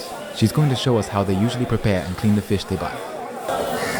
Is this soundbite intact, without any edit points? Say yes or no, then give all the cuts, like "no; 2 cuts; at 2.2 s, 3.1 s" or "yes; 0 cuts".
yes; 0 cuts